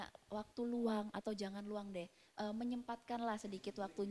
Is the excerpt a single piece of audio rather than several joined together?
yes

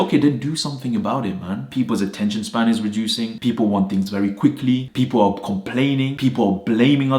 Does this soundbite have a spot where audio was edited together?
yes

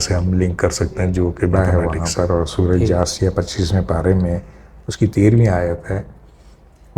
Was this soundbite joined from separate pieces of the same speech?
yes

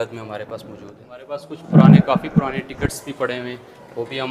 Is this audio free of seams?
yes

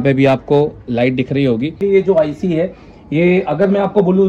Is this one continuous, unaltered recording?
no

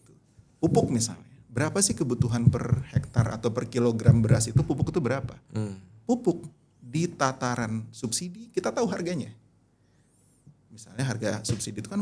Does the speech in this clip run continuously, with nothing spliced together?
yes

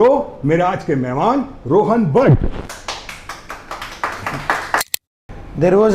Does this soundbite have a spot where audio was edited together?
yes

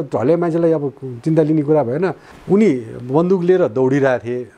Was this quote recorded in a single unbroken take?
no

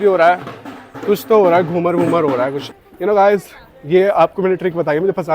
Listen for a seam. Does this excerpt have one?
yes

